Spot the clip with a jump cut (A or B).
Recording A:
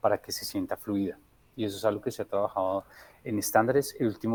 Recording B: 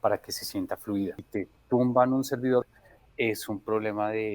B